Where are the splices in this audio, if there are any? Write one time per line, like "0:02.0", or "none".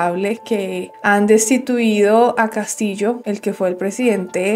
none